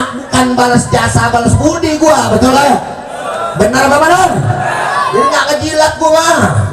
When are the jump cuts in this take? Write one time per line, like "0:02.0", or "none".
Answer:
none